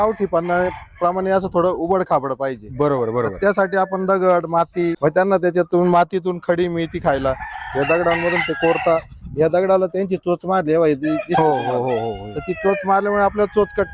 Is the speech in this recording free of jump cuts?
no; 1 cut; at 5.0 s

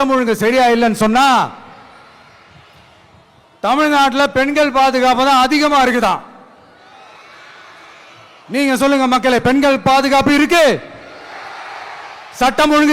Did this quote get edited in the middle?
no; 0 cuts

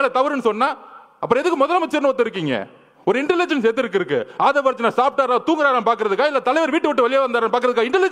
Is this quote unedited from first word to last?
yes; 0 cuts

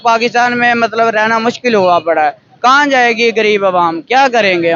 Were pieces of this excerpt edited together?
no; 0 cuts

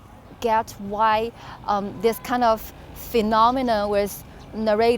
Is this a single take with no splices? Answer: yes; 0 cuts

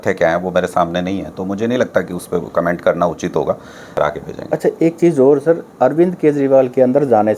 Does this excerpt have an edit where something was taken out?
yes; 1 cut; at 4.0 s

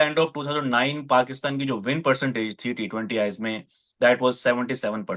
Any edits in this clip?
no; 0 cuts

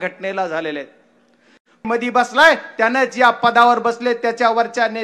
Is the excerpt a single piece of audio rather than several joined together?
no; 1 cut; at 1.8 s

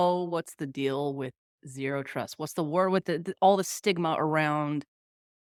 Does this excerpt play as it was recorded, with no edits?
yes; 0 cuts

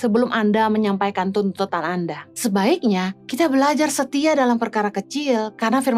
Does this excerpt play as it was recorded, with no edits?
no; 2 cuts; at 2.2 s, 3.2 s

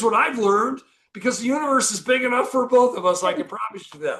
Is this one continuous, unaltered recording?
yes; 0 cuts

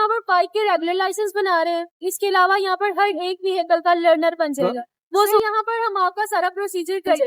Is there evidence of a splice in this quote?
yes; 1 cut; at 5.4 s

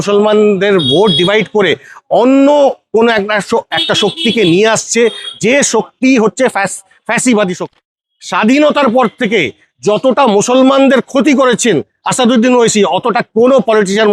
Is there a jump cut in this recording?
yes; 1 cut; at 7.8 s

